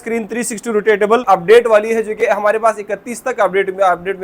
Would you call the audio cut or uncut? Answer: cut